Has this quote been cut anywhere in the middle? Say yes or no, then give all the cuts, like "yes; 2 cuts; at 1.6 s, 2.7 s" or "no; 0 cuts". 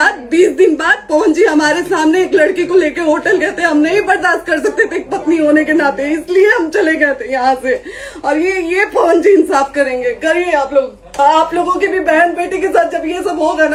no; 0 cuts